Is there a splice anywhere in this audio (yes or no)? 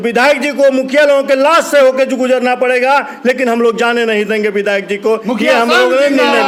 no